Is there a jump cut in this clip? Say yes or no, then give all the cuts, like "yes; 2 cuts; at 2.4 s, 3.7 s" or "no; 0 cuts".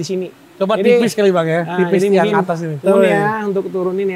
no; 0 cuts